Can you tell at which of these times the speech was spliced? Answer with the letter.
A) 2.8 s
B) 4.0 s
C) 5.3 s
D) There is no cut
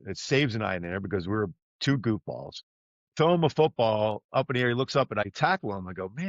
C